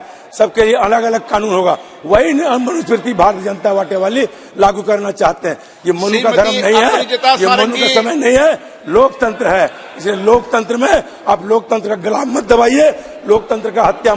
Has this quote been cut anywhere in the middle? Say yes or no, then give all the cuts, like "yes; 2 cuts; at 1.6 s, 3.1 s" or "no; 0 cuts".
no; 0 cuts